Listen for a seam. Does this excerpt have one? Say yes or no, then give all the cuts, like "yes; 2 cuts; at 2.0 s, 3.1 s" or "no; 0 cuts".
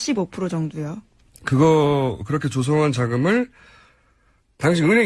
yes; 1 cut; at 2.3 s